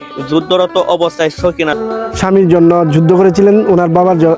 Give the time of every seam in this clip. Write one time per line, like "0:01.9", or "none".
0:01.8